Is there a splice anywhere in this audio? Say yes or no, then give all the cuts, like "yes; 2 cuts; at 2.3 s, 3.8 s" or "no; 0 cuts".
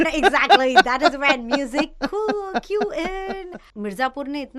yes; 1 cut; at 3.6 s